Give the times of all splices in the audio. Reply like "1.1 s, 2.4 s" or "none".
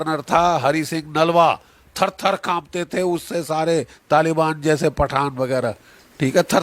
none